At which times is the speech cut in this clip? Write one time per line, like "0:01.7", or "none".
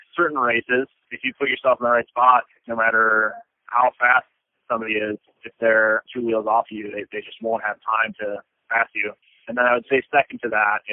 0:09.3